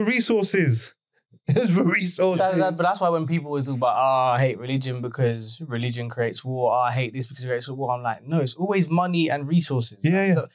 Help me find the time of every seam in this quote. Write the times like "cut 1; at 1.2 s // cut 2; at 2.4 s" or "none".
none